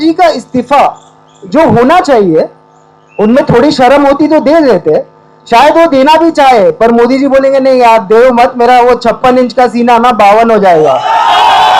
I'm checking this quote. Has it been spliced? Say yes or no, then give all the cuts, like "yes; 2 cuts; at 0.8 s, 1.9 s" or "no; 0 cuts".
no; 0 cuts